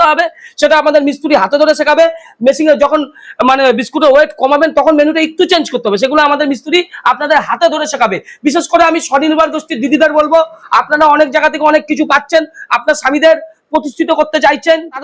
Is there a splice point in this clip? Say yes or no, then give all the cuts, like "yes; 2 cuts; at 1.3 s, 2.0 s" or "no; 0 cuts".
no; 0 cuts